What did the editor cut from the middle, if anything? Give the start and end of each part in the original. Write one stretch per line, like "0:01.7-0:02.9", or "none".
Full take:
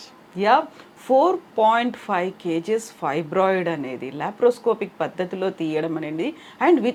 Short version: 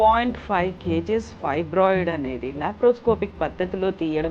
none